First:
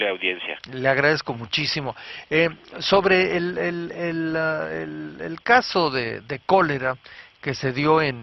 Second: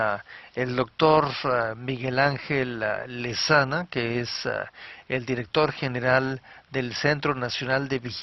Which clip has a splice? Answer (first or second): second